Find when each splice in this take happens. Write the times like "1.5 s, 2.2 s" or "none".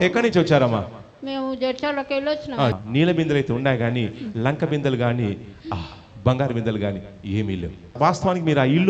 2.7 s, 8.0 s